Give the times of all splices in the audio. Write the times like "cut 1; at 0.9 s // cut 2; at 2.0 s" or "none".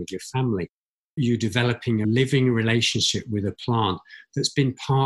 cut 1; at 1.2 s // cut 2; at 2.0 s